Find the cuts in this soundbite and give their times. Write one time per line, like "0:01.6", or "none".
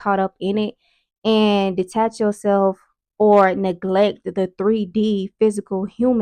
none